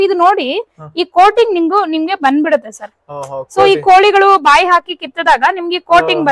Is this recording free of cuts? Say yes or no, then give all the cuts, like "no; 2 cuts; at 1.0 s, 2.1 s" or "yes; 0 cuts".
yes; 0 cuts